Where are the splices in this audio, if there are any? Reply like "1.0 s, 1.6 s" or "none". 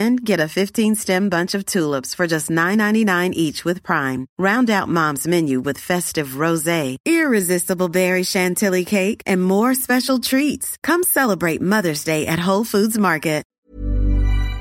13.6 s